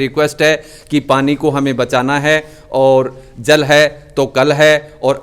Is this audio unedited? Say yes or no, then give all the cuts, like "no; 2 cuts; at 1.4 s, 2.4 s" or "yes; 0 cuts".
yes; 0 cuts